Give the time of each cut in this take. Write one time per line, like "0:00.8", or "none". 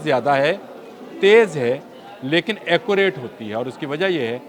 none